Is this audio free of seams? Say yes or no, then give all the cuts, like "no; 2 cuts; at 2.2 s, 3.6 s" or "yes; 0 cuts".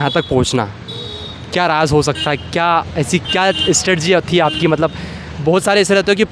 yes; 0 cuts